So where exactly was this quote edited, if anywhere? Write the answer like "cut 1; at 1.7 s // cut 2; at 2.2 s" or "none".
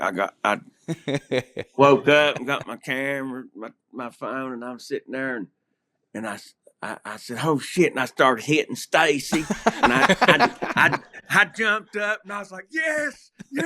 none